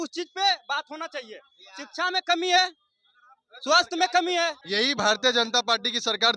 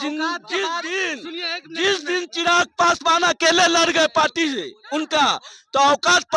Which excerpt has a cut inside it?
first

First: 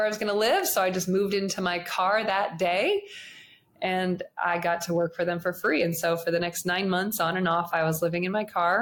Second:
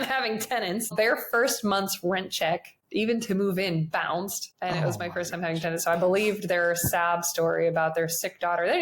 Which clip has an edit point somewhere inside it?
second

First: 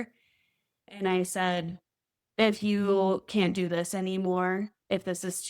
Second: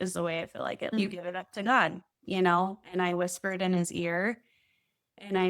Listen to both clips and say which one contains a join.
second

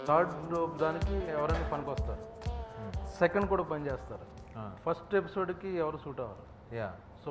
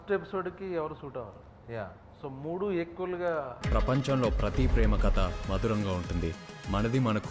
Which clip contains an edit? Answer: second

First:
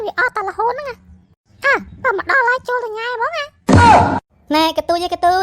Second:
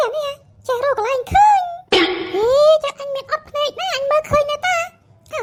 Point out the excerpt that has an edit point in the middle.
first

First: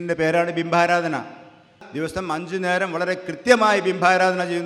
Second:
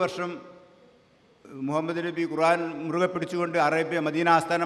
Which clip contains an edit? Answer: first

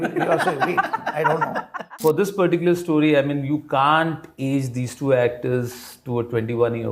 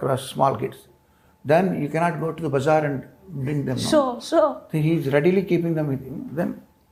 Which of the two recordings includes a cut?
first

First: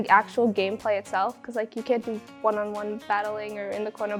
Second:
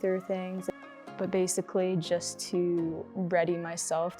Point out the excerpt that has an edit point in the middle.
second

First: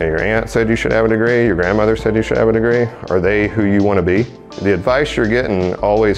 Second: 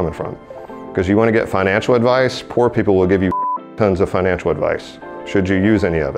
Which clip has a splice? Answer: first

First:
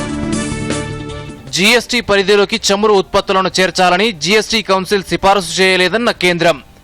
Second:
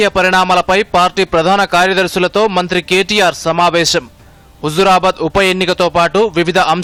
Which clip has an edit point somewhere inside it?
first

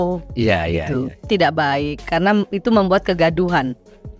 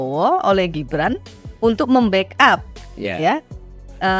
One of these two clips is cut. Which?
first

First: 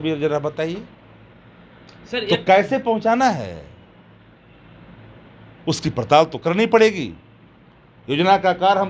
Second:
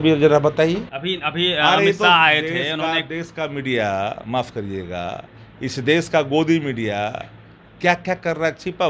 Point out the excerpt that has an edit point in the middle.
second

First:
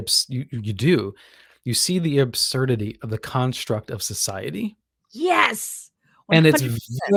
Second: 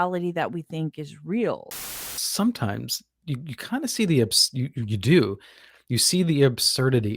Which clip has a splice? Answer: second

